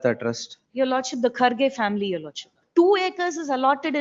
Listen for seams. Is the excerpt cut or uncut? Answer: cut